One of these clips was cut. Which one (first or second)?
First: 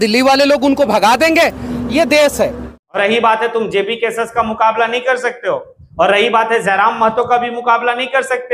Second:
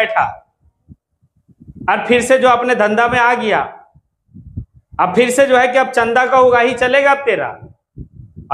first